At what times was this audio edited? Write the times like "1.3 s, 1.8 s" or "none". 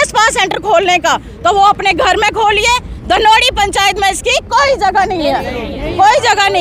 none